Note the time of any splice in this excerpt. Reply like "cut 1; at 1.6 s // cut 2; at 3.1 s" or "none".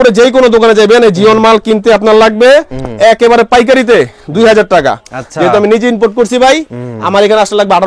none

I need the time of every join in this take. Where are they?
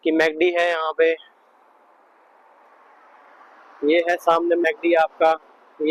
none

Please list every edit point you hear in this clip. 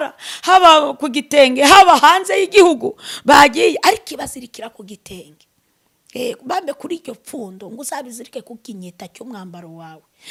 none

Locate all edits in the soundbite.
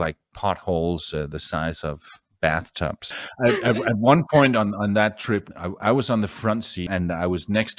cut 1; at 3.1 s // cut 2; at 6.8 s

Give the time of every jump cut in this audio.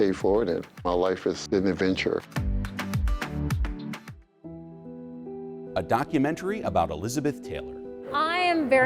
cut 1; at 2.4 s // cut 2; at 4.1 s

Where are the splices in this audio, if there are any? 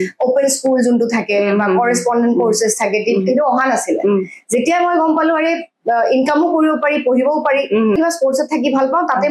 cut 1; at 8.0 s

